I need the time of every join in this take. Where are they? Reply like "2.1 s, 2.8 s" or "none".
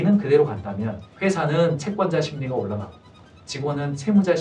1.0 s